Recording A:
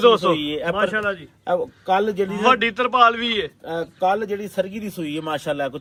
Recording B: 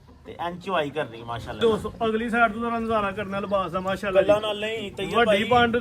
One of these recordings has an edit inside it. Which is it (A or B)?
B